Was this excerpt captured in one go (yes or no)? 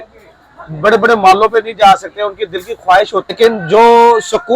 no